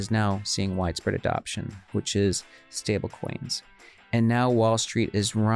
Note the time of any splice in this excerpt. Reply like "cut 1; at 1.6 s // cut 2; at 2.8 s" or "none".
none